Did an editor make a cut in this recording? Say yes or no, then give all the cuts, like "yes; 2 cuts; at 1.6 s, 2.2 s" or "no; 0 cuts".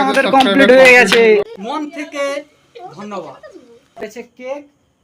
yes; 2 cuts; at 1.7 s, 4.0 s